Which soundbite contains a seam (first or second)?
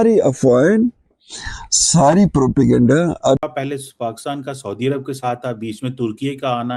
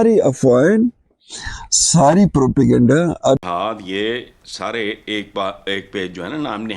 second